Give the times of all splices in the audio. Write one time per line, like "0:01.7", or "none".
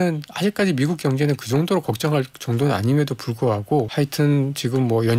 0:03.9